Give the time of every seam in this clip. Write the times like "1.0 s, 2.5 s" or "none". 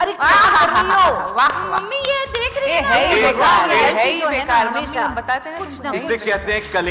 none